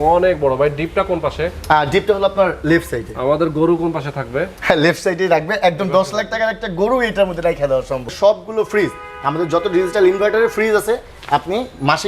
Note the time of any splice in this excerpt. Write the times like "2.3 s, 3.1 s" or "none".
8.1 s